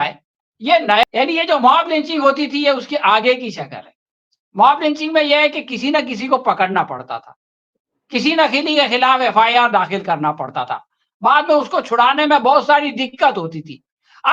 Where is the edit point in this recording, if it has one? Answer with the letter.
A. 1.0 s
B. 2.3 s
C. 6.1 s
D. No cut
A